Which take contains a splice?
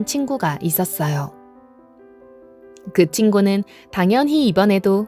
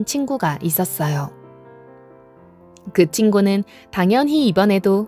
first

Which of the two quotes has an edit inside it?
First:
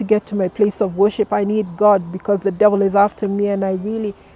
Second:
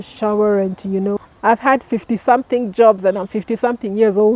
second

